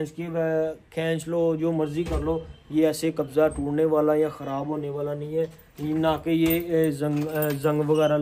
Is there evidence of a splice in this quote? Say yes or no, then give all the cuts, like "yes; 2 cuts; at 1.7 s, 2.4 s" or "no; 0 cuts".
no; 0 cuts